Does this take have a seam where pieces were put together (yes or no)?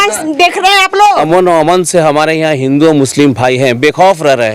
yes